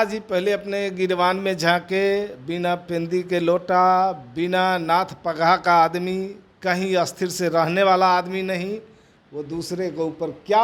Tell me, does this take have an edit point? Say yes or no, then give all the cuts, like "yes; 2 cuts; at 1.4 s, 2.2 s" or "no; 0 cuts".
no; 0 cuts